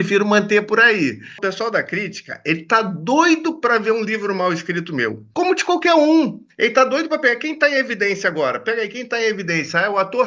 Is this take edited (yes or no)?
yes